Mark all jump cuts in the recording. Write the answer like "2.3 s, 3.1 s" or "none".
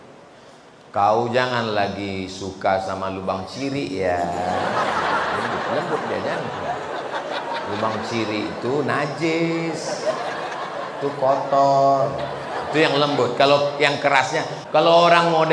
14.5 s